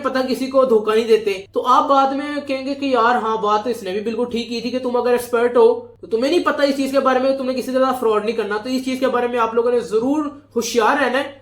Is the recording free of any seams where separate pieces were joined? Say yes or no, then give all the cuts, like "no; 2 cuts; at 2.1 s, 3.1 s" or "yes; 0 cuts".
yes; 0 cuts